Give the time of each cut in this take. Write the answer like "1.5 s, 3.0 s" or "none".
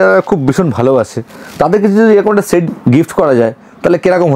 2.6 s